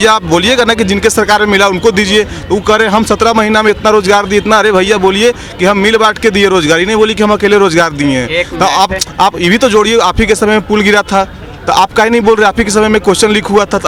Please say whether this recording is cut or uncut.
uncut